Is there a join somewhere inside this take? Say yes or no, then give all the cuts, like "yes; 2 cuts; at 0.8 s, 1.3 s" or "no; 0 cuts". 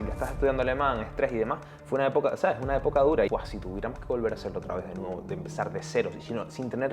yes; 1 cut; at 3.3 s